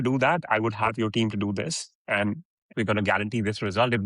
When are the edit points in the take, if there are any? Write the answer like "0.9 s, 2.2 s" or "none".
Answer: 2.7 s